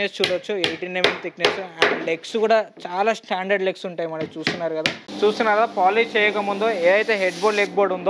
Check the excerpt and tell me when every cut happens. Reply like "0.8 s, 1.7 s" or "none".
5.0 s